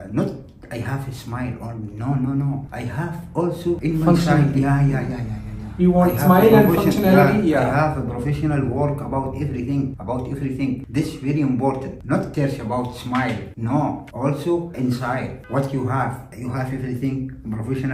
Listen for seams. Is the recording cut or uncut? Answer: uncut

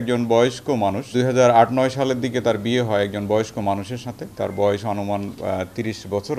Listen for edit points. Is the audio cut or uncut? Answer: cut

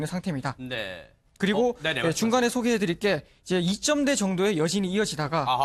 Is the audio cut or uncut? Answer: uncut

